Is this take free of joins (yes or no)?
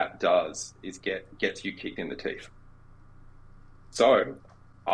yes